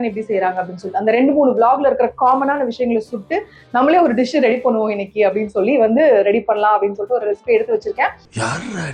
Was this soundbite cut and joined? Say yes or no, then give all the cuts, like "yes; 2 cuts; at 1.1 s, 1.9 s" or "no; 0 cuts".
no; 0 cuts